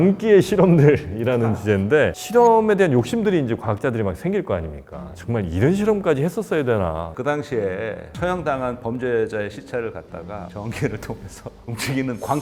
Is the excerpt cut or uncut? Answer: cut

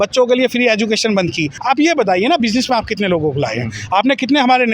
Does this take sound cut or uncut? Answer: cut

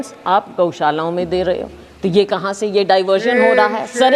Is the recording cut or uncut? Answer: uncut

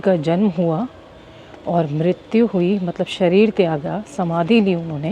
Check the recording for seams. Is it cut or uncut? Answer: uncut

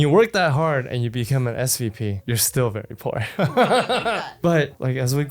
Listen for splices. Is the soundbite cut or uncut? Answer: uncut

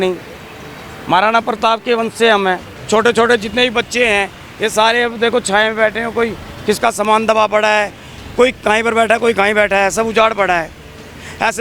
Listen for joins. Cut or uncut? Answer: cut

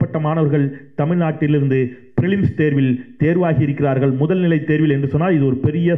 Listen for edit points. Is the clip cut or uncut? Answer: uncut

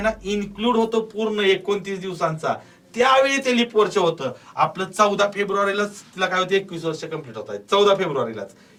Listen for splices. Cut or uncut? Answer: uncut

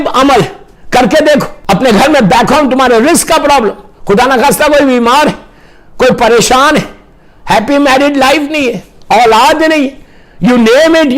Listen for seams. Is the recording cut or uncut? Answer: cut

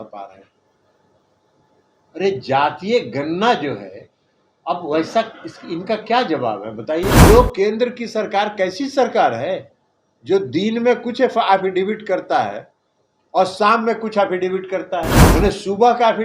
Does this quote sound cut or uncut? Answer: cut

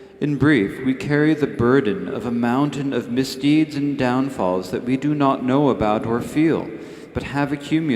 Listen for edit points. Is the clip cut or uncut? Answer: cut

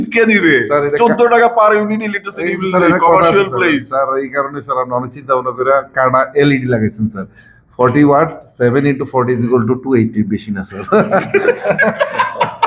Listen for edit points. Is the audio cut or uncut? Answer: uncut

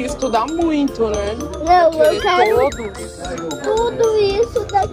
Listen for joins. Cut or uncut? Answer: uncut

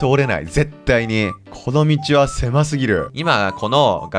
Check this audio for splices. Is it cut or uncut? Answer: cut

